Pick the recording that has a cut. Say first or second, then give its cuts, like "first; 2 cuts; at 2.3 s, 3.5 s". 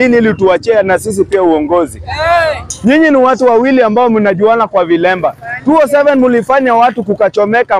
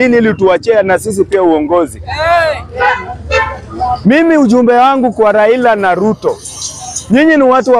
first; 1 cut; at 2.7 s